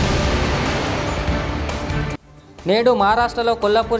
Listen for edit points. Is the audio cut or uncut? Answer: cut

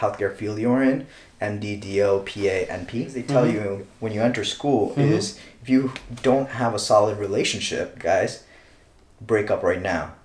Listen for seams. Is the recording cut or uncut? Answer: cut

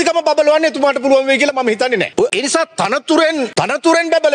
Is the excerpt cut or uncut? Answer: uncut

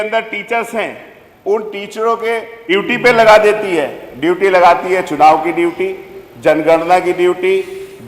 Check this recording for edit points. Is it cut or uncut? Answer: cut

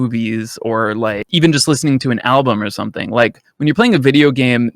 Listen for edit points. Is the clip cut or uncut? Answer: cut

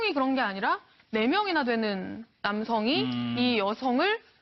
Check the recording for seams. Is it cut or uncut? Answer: cut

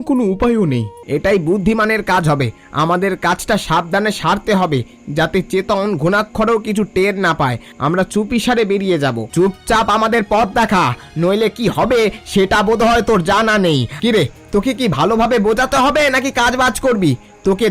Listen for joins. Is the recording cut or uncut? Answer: cut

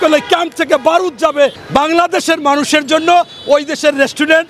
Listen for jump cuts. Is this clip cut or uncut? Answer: cut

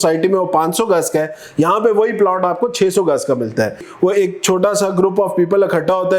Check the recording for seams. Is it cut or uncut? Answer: cut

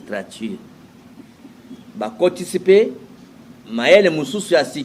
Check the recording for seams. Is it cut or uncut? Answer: uncut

